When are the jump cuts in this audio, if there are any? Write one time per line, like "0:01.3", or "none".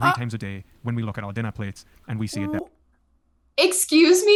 none

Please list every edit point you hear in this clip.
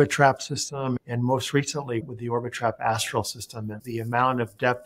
0:01.0
0:02.0
0:03.8

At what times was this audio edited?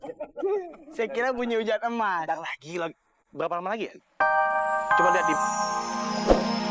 0:04.2

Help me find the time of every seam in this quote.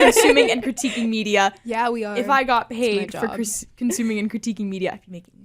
none

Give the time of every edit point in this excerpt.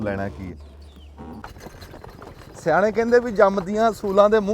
0:01.4

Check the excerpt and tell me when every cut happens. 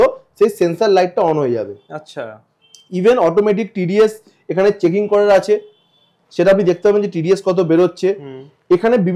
none

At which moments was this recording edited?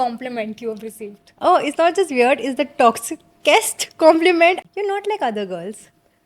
0:04.6

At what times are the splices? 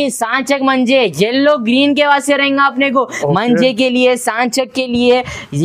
none

